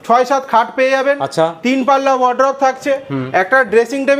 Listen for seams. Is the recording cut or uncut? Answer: uncut